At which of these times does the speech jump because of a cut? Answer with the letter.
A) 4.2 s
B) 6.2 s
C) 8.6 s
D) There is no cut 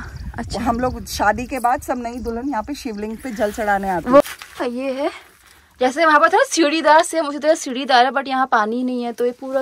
A